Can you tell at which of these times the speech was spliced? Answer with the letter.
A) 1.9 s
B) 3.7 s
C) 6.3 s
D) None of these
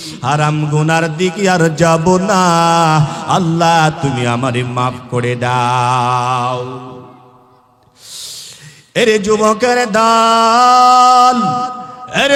D